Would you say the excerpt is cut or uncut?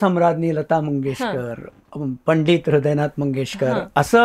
uncut